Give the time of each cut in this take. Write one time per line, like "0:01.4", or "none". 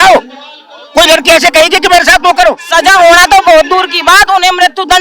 0:02.6

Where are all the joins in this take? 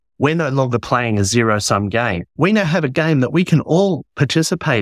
0:02.3

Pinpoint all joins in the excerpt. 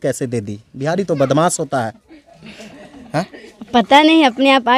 none

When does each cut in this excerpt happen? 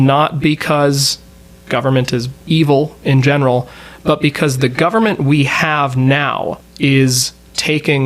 0:02.3
0:06.6

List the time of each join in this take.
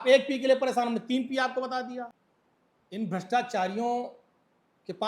0:02.1

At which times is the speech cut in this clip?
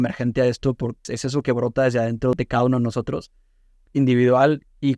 0:01.1
0:02.3

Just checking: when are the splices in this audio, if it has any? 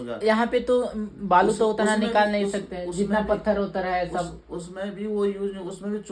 none

